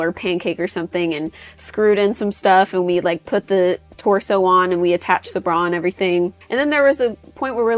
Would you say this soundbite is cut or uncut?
cut